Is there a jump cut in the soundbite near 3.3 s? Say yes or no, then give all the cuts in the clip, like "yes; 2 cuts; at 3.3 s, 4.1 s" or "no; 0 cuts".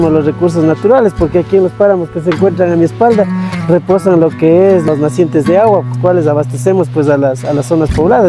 no; 2 cuts; at 4.9 s, 5.9 s